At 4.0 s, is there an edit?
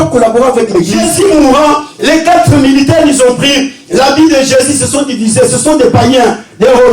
no; 1 cut; at 1.0 s

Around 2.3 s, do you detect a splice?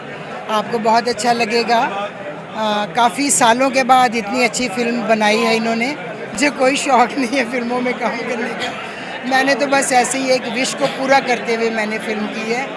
no; 1 cut; at 6.4 s

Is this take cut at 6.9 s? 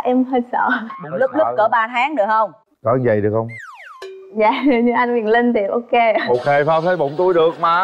no; 0 cuts

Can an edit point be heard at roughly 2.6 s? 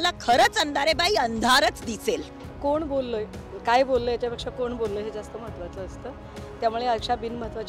no; 0 cuts

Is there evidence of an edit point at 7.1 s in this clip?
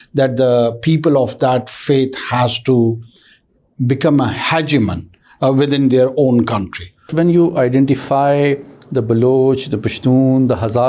yes; 1 cut; at 7.1 s

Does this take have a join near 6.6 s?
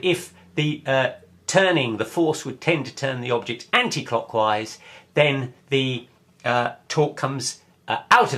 yes; 1 cut; at 6.6 s

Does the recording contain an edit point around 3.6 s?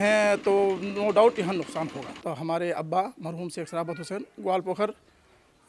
no; 1 cut; at 2.2 s

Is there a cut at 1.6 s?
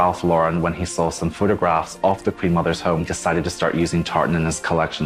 no; 1 cut; at 3.1 s

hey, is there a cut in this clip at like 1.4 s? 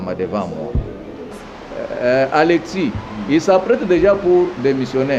yes; 1 cut; at 1.4 s

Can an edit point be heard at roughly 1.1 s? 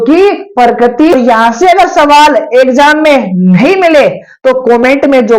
yes; 1 cut; at 1.1 s

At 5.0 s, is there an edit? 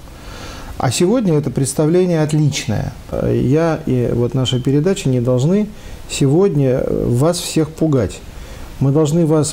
no; 1 cut; at 3.1 s

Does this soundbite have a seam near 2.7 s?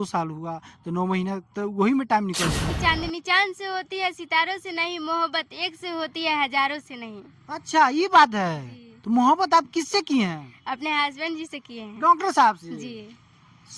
yes; 1 cut; at 2.7 s

